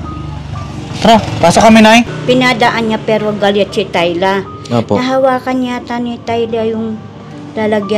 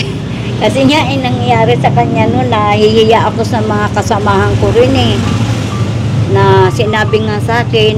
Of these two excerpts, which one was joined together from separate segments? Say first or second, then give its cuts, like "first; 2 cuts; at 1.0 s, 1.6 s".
first; 1 cut; at 2.2 s